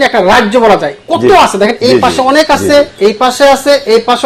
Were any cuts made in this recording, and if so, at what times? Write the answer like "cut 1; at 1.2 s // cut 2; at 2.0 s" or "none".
none